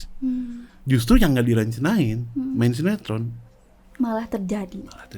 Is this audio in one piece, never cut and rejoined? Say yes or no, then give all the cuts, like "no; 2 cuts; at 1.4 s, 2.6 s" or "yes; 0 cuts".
yes; 0 cuts